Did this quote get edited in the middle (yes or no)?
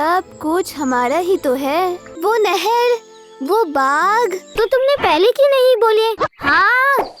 yes